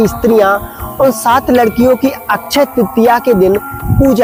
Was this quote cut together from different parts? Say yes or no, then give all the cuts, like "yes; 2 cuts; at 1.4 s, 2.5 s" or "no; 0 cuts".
no; 0 cuts